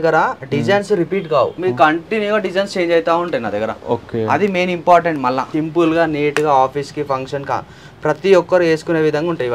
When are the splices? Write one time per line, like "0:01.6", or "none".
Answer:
0:01.6
0:05.5